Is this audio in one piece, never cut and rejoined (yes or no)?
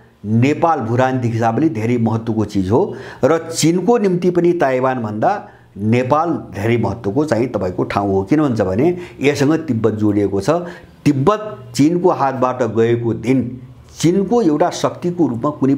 yes